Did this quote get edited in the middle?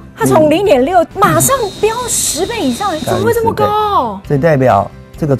yes; 2 cuts; at 1.1 s, 4.2 s

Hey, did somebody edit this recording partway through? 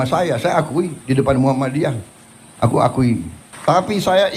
yes; 1 cut; at 3.4 s

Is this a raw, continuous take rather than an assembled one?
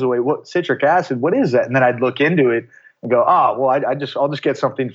yes; 0 cuts

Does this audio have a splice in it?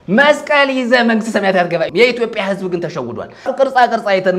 yes; 2 cuts; at 1.9 s, 3.5 s

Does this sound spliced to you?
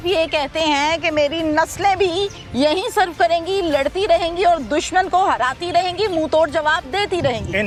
no; 0 cuts

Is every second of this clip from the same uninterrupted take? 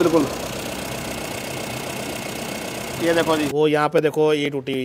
no; 1 cut; at 3.5 s

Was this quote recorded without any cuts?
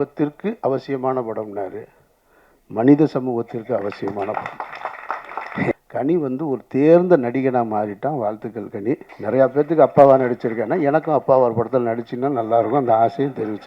no; 2 cuts; at 5.7 s, 9.1 s

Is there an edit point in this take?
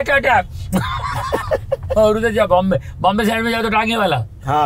yes; 1 cut; at 1.9 s

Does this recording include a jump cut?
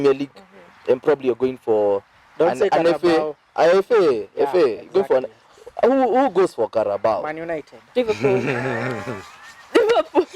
no; 0 cuts

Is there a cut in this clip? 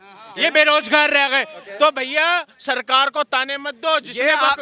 no; 0 cuts

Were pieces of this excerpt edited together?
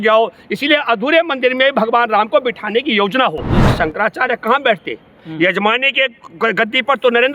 yes; 1 cut; at 3.7 s

